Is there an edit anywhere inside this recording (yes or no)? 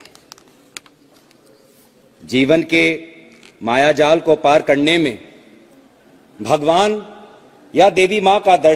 yes